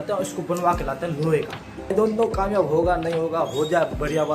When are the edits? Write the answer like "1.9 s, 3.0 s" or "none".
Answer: 1.9 s